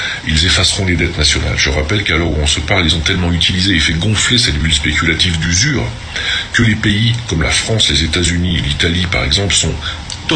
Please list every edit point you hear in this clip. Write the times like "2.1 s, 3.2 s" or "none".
none